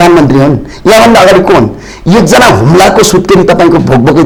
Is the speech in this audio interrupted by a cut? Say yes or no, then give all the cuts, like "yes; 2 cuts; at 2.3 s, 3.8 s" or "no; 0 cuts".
no; 0 cuts